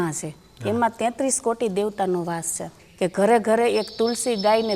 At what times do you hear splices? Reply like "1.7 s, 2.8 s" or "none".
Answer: 2.8 s